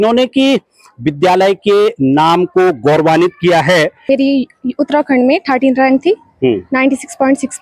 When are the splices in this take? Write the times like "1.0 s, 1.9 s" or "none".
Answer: 4.0 s